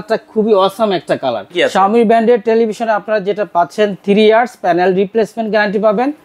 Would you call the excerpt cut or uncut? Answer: cut